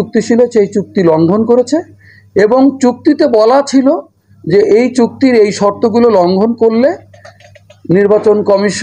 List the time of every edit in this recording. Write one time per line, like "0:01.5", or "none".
none